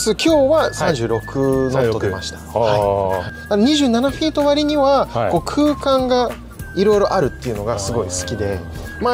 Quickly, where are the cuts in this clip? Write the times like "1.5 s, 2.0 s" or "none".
3.3 s